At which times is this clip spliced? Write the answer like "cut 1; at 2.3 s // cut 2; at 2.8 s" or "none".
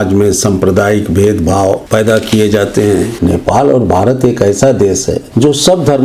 cut 1; at 1.8 s // cut 2; at 3.1 s // cut 3; at 5.2 s